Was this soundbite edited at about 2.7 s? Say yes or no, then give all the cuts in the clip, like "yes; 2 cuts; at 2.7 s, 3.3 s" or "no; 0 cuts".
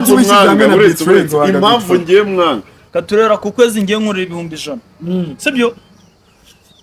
yes; 1 cut; at 2.7 s